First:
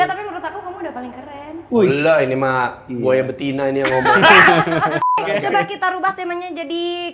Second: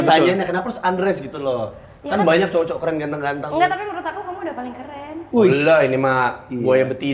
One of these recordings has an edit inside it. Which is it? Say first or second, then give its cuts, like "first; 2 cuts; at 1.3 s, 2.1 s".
first; 1 cut; at 5.4 s